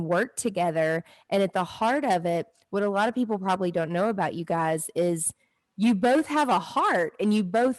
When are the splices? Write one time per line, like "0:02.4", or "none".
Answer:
none